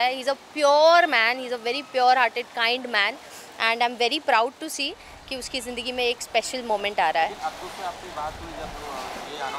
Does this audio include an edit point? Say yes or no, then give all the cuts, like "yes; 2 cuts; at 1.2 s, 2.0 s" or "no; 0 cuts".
no; 0 cuts